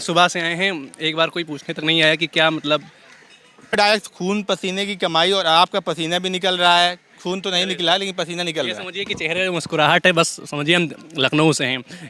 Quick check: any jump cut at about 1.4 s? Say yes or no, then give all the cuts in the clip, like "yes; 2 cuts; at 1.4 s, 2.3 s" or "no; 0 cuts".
no; 1 cut; at 3.8 s